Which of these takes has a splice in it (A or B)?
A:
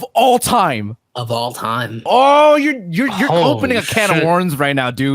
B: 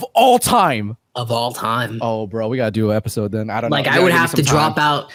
A